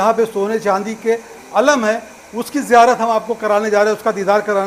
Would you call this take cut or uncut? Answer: uncut